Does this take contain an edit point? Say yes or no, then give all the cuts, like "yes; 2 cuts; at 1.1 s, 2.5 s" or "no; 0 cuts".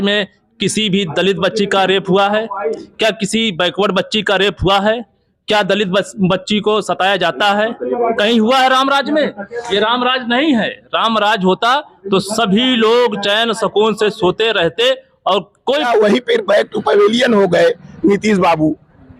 yes; 1 cut; at 15.9 s